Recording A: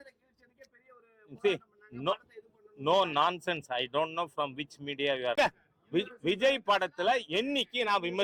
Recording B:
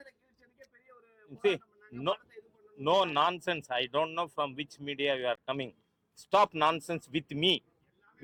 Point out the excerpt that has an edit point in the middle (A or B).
A